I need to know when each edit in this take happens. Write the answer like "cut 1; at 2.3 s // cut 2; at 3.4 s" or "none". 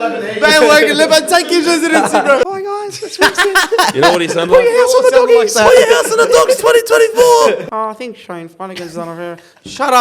cut 1; at 2.4 s // cut 2; at 7.7 s